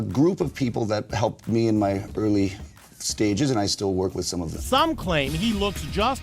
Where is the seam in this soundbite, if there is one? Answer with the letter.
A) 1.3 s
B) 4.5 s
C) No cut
B